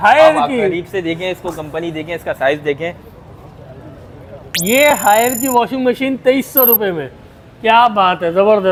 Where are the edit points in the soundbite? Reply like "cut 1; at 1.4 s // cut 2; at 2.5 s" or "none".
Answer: none